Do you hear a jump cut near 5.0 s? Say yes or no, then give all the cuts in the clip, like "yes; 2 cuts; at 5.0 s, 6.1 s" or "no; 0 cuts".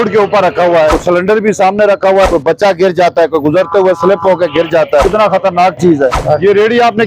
yes; 4 cuts; at 1.0 s, 2.3 s, 5.0 s, 6.2 s